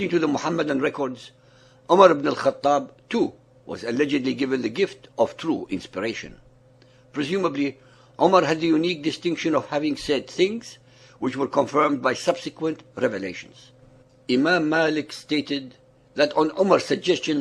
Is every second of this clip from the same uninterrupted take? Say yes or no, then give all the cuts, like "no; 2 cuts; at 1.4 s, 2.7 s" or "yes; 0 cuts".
yes; 0 cuts